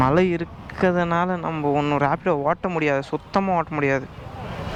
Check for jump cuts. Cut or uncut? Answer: uncut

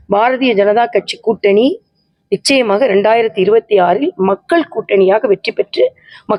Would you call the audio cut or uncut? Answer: uncut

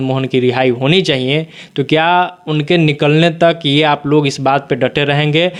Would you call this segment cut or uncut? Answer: uncut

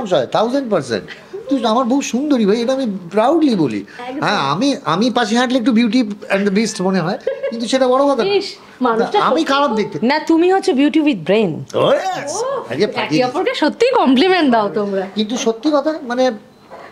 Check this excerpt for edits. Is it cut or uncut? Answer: uncut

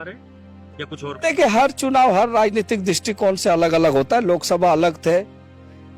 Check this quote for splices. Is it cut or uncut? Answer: uncut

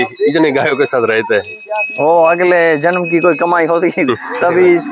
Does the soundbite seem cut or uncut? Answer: uncut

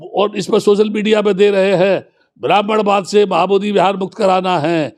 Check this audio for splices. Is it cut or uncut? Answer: uncut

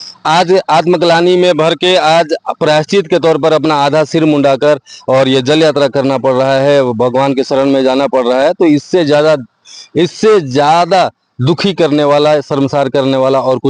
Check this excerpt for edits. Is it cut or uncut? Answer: uncut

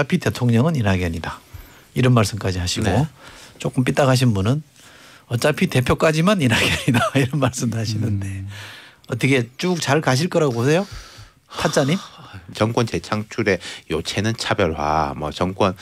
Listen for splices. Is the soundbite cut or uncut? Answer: cut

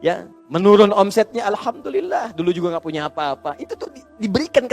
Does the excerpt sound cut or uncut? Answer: uncut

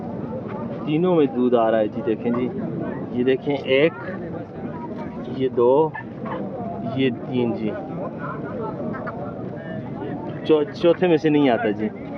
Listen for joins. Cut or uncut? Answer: uncut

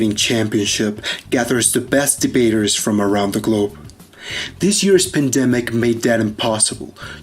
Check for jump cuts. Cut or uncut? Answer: cut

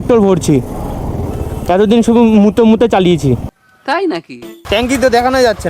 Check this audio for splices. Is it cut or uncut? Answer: cut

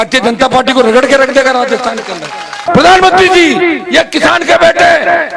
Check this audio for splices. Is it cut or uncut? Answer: cut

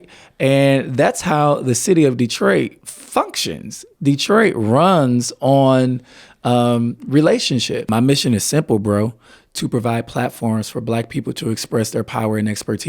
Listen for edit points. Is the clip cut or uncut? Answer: cut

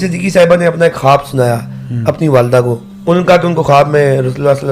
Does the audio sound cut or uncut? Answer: cut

